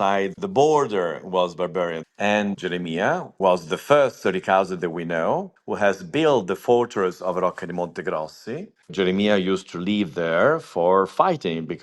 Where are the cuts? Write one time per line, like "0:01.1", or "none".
0:02.4
0:05.6
0:08.9